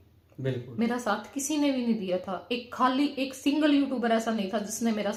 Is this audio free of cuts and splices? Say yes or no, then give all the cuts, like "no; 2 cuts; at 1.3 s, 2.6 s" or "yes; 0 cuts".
yes; 0 cuts